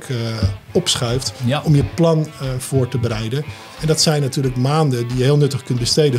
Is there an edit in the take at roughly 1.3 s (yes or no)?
yes